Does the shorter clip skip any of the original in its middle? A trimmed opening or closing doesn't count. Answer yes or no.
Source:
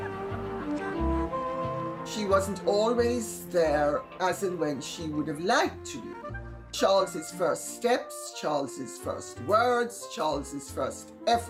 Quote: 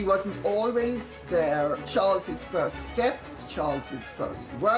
yes